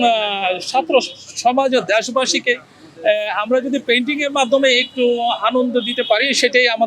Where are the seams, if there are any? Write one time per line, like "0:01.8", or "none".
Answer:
none